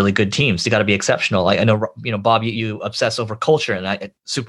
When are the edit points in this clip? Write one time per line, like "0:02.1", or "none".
0:02.5